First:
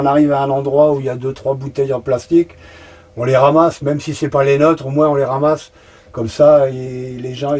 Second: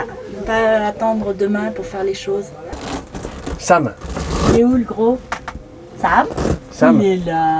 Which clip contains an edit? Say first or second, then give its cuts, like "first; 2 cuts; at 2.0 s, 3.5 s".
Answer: second; 1 cut; at 2.8 s